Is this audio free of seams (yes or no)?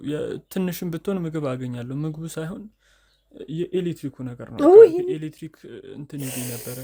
yes